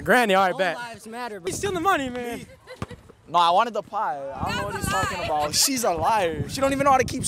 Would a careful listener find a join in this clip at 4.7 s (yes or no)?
no